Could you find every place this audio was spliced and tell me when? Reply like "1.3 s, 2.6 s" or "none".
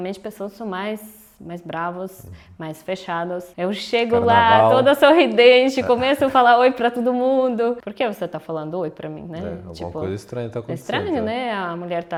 none